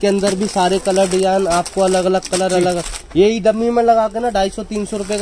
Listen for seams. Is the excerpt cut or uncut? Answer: uncut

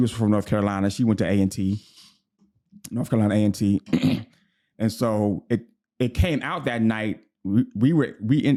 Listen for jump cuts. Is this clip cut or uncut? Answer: uncut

